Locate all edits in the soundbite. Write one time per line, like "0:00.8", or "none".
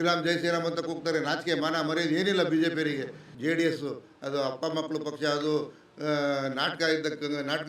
0:03.3